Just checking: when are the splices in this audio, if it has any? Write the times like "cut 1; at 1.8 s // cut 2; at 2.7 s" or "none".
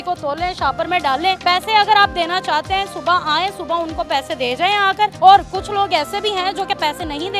cut 1; at 1.4 s // cut 2; at 5.1 s